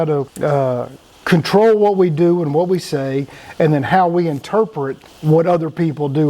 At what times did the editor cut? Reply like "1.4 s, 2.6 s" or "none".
none